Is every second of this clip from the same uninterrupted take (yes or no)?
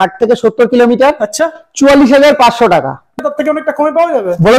no